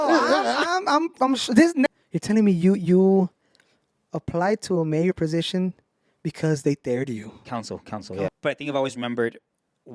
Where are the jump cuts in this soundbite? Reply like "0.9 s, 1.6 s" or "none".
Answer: 1.9 s, 8.1 s